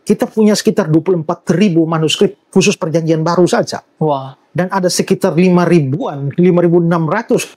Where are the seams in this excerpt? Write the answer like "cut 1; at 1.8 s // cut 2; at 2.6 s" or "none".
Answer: none